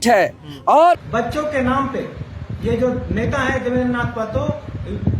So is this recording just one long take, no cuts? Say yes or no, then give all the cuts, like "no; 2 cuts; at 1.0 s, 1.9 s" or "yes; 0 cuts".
no; 1 cut; at 1.0 s